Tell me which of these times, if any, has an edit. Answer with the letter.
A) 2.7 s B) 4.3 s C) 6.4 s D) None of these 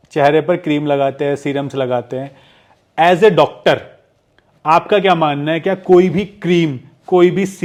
D